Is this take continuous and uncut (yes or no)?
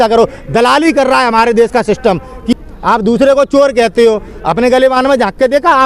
no